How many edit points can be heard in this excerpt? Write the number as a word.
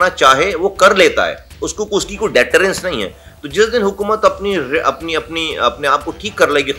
zero